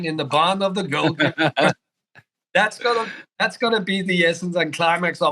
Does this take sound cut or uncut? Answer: cut